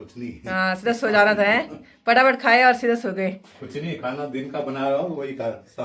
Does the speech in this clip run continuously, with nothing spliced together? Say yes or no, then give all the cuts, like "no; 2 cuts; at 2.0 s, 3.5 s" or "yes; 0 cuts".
yes; 0 cuts